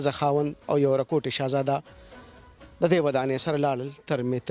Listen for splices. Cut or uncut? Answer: uncut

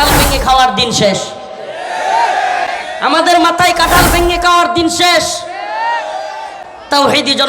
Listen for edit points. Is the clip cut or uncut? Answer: uncut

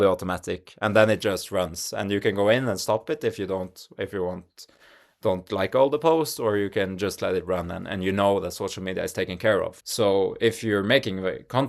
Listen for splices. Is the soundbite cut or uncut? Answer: cut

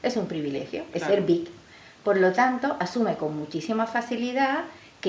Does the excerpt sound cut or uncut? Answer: uncut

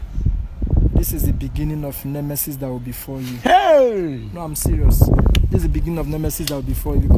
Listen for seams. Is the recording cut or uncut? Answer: uncut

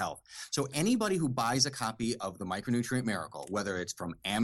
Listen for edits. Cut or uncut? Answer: uncut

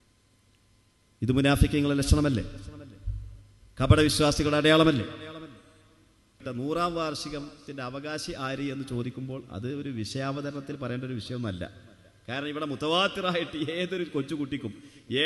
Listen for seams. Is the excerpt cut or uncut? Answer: cut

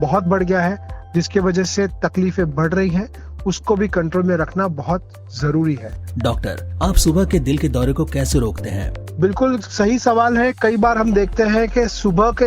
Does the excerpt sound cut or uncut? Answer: cut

